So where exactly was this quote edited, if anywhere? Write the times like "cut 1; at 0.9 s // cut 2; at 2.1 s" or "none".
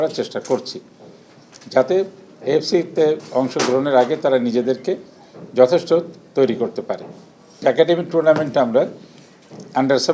cut 1; at 7.6 s